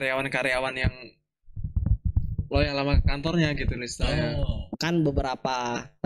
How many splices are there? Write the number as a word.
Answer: one